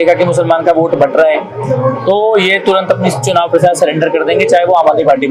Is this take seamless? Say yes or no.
yes